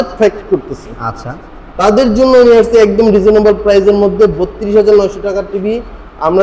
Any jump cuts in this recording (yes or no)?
no